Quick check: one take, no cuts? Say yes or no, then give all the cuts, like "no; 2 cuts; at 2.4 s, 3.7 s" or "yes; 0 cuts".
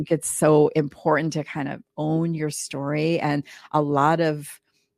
yes; 0 cuts